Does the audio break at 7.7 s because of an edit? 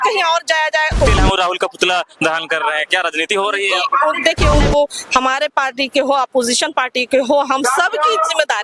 no; 2 cuts; at 1.1 s, 4.6 s

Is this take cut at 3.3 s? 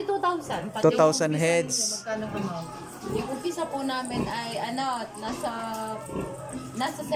no; 0 cuts

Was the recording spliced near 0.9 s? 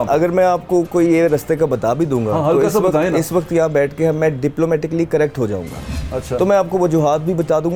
no; 0 cuts

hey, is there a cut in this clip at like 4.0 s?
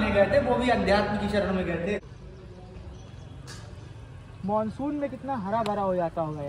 no; 1 cut; at 2.0 s

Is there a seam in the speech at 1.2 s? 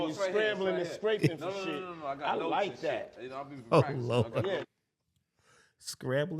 yes; 1 cut; at 1.2 s

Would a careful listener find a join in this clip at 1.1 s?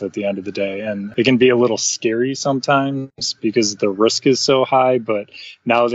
yes; 1 cut; at 1.1 s

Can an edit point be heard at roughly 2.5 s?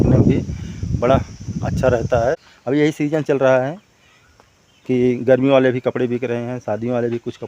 yes; 1 cut; at 2.5 s

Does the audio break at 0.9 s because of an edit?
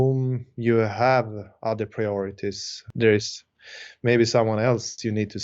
no; 1 cut; at 2.9 s

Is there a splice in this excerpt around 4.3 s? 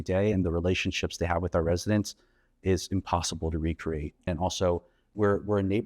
yes; 1 cut; at 4.3 s

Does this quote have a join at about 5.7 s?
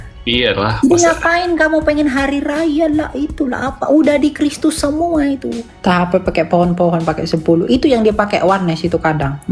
yes; 1 cut; at 5.7 s

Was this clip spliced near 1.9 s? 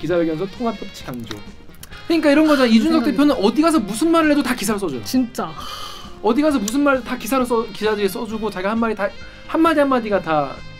yes; 1 cut; at 1.9 s

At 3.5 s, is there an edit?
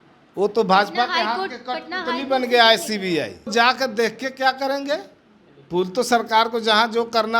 yes; 1 cut; at 3.5 s

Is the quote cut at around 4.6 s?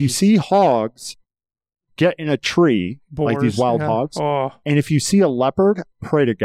yes; 1 cut; at 4.6 s

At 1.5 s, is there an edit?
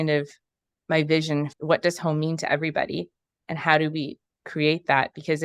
yes; 1 cut; at 1.5 s

